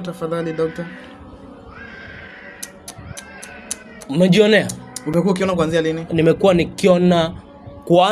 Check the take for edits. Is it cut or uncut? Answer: uncut